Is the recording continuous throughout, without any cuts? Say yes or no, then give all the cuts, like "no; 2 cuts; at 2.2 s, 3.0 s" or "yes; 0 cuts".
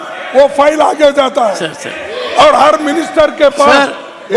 yes; 0 cuts